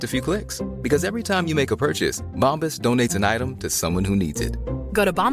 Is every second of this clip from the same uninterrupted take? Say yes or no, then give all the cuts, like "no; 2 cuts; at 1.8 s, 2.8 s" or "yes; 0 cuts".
yes; 0 cuts